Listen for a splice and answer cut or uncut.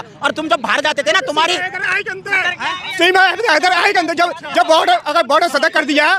uncut